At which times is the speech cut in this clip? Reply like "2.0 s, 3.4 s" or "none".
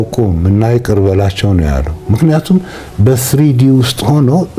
none